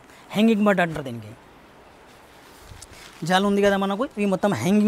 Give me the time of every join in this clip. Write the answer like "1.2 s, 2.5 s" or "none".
none